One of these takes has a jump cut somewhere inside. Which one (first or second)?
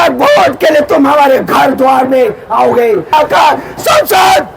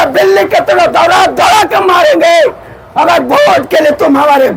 first